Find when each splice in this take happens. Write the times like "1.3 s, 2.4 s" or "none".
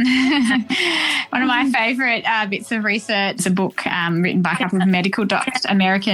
3.4 s